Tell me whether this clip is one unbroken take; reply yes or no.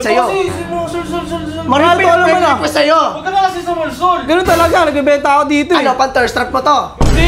yes